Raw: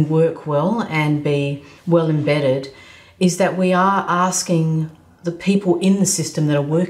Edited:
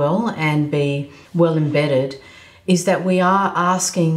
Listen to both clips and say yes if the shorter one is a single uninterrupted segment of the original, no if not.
yes